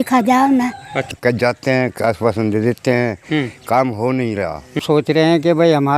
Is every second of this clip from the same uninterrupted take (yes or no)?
no